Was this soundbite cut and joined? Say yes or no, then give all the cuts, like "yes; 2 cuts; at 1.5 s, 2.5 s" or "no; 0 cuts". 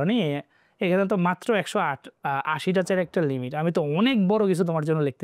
no; 0 cuts